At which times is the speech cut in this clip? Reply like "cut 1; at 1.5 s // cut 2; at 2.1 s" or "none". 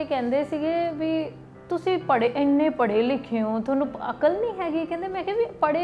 none